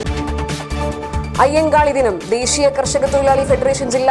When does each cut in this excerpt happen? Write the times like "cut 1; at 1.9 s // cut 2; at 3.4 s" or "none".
cut 1; at 0.9 s